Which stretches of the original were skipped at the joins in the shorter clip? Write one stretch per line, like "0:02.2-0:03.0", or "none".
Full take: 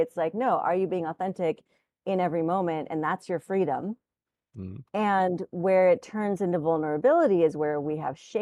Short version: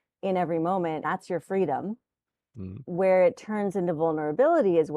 0:02.9-0:03.0
0:04.8-0:05.5